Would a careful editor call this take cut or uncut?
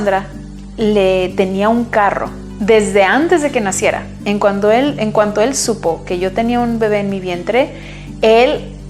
uncut